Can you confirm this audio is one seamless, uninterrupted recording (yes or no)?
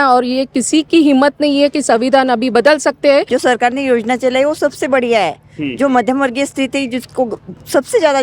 no